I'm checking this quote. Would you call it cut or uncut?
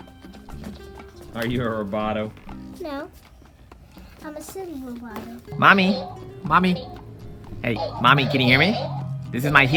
cut